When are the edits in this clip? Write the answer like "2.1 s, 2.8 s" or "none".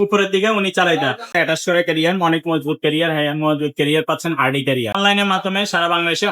1.3 s, 5.0 s